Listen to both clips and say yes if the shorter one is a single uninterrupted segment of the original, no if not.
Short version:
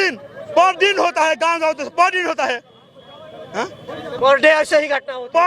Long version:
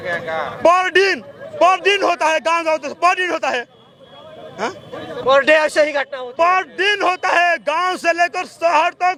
yes